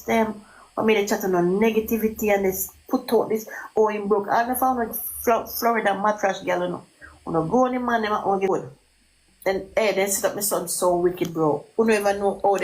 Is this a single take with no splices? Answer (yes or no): no